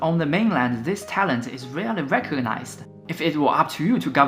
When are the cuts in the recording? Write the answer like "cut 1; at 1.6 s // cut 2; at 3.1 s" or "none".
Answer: cut 1; at 2.8 s